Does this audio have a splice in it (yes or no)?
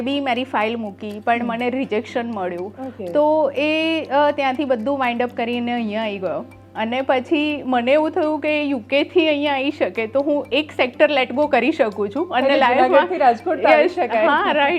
no